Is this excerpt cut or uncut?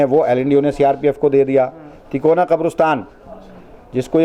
uncut